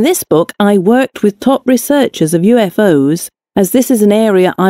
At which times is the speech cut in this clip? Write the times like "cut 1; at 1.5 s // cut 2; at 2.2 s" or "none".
cut 1; at 2.8 s